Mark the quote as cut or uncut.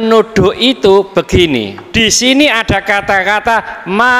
cut